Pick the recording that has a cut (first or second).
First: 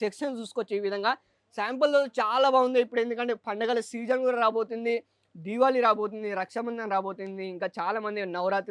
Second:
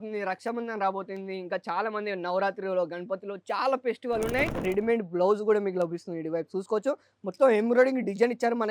second